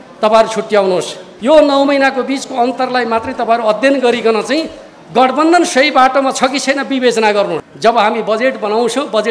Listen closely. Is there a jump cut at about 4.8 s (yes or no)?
no